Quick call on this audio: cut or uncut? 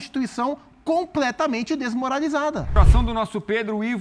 cut